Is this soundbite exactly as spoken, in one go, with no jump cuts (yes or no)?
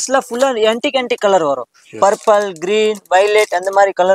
yes